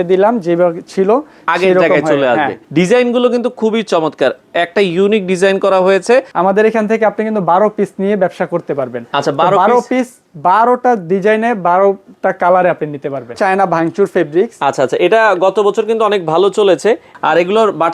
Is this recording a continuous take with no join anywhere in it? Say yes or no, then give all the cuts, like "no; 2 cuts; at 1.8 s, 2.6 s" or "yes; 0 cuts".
no; 4 cuts; at 2.6 s, 6.3 s, 13.4 s, 17.1 s